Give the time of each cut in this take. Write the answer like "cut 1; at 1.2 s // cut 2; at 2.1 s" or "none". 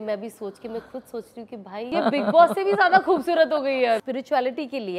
cut 1; at 1.9 s // cut 2; at 4.0 s